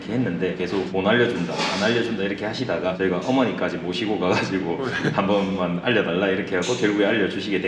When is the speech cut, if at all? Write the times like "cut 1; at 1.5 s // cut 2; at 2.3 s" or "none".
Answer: none